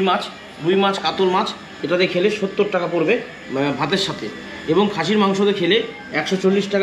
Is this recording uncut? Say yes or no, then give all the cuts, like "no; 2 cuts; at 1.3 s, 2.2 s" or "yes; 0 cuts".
yes; 0 cuts